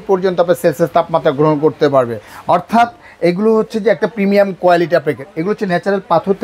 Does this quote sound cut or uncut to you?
uncut